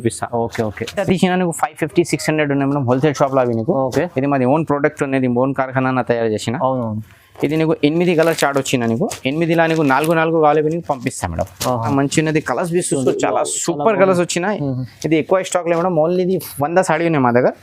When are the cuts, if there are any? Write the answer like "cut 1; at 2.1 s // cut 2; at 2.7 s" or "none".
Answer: cut 1; at 1.0 s // cut 2; at 11.9 s